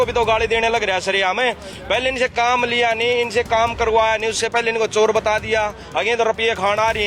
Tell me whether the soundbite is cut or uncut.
uncut